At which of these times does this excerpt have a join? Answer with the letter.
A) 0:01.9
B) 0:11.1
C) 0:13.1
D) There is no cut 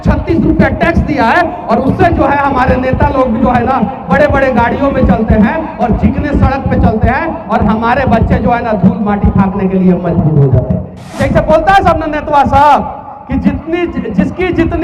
B